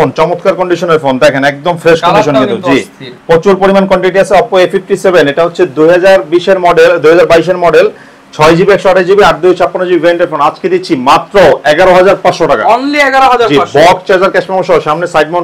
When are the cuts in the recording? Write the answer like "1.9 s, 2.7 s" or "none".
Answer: none